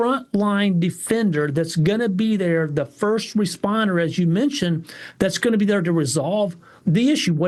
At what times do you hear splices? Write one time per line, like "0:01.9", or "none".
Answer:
none